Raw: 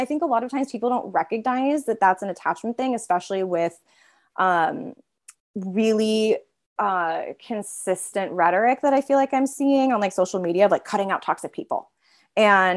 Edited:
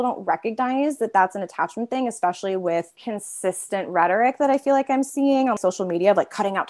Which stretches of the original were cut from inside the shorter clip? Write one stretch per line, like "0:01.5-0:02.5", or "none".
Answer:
0:03.8-0:07.4
0:10.0-0:10.1